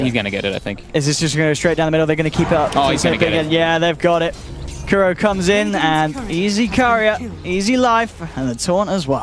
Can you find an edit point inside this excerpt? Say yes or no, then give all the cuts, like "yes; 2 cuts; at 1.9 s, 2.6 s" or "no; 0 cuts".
no; 0 cuts